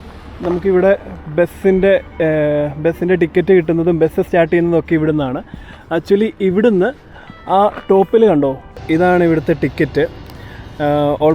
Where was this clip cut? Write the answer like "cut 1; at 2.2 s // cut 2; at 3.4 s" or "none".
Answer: cut 1; at 8.8 s